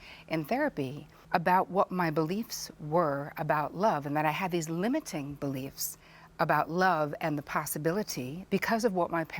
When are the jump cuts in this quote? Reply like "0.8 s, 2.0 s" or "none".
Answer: 1.1 s, 8.4 s